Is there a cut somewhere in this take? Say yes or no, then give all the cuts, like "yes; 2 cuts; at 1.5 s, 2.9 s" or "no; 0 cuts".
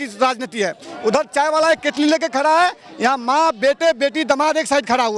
no; 0 cuts